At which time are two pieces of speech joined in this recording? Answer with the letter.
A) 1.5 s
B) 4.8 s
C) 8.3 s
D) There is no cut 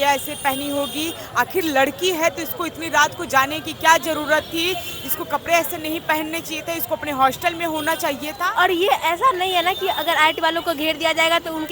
C